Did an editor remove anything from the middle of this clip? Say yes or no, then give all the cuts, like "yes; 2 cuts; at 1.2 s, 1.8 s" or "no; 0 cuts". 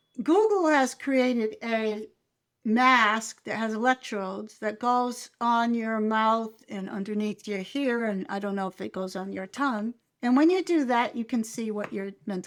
no; 0 cuts